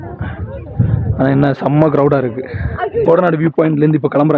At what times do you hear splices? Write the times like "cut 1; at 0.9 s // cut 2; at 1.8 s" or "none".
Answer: cut 1; at 3.0 s

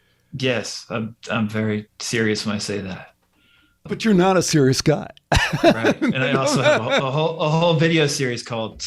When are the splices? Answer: cut 1; at 3.8 s

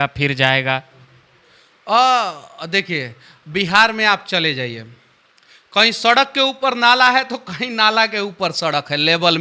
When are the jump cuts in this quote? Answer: none

